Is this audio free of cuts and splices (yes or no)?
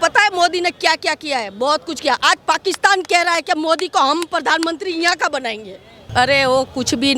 no